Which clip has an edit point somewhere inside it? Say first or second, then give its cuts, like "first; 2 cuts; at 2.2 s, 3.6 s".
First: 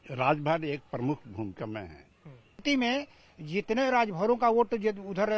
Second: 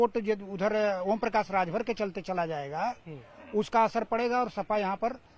first; 1 cut; at 2.6 s